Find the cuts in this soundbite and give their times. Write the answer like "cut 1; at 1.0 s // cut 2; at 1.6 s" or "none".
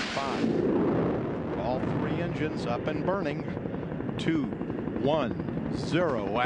none